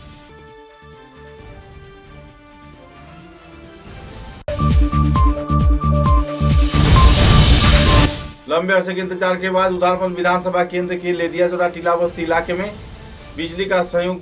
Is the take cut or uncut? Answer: cut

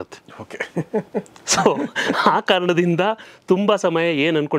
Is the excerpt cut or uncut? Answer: uncut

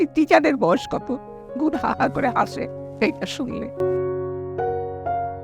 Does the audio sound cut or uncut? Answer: cut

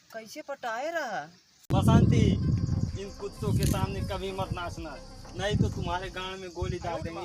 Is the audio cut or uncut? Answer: uncut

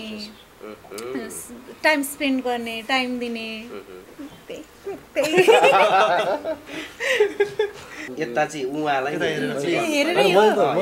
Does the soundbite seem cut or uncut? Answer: cut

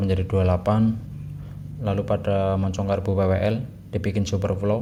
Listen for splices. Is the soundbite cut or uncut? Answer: uncut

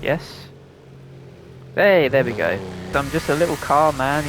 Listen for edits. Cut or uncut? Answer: cut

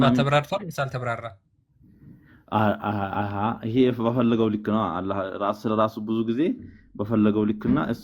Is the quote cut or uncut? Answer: uncut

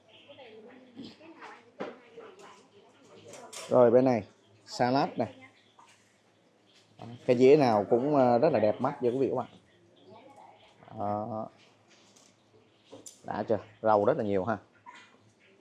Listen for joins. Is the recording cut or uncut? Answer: uncut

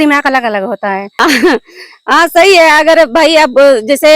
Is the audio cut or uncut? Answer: cut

